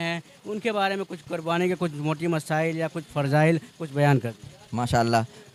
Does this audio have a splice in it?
no; 0 cuts

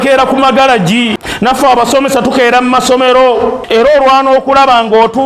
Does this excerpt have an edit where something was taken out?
yes; 2 cuts; at 1.2 s, 3.6 s

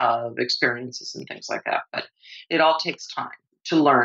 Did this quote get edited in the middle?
no; 0 cuts

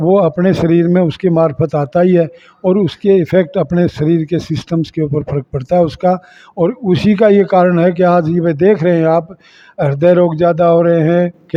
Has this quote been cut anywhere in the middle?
no; 0 cuts

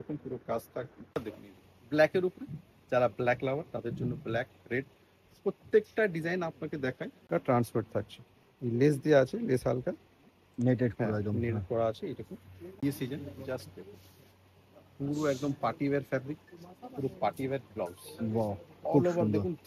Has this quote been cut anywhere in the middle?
yes; 3 cuts; at 1.2 s, 7.2 s, 12.8 s

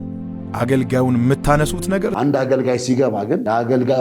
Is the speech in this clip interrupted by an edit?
yes; 1 cut; at 2.1 s

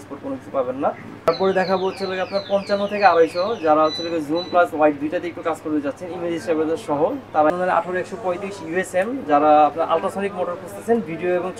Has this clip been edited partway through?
yes; 2 cuts; at 1.3 s, 7.5 s

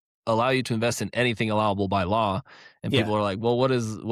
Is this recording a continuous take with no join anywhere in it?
yes; 0 cuts

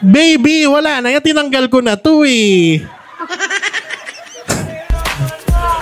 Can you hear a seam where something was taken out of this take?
no; 0 cuts

